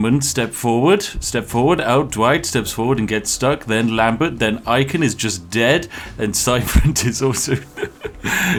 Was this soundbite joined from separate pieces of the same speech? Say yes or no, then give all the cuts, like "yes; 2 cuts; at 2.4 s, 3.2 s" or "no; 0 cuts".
no; 0 cuts